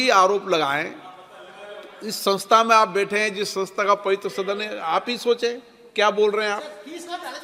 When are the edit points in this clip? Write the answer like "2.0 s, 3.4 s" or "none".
none